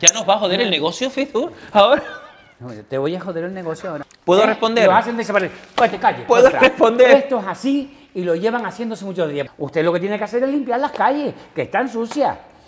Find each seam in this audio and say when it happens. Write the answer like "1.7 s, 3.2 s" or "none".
4.1 s, 9.5 s